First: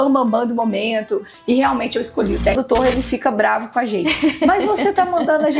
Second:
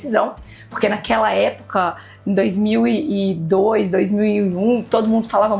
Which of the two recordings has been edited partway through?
first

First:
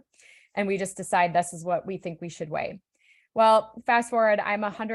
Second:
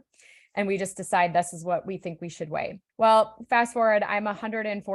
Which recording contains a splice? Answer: second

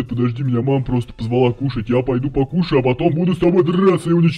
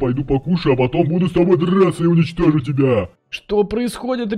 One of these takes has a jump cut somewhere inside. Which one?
second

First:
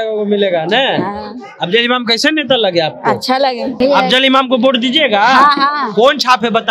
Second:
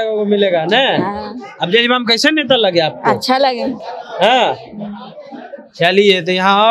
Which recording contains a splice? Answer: first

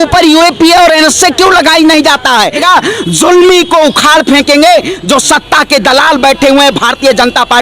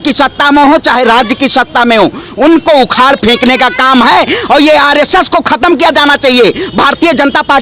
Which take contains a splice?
first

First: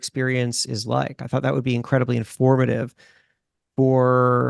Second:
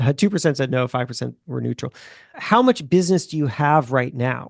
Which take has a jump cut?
second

